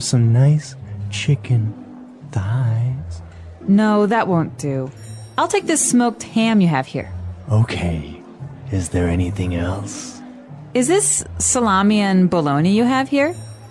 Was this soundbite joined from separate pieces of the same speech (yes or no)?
no